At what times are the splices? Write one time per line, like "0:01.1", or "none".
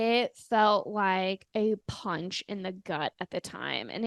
none